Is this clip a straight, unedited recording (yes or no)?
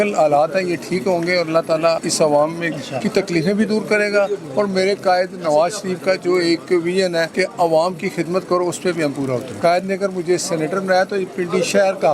no